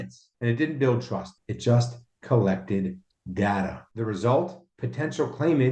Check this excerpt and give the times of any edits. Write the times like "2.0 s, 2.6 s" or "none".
none